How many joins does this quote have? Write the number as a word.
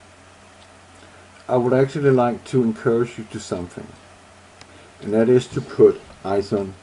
zero